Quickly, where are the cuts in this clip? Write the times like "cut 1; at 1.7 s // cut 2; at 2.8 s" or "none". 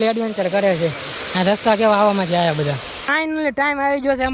cut 1; at 3.1 s